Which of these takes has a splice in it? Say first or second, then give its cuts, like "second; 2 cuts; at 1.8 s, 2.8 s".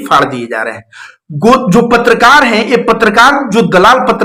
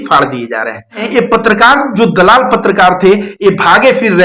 second; 1 cut; at 1.0 s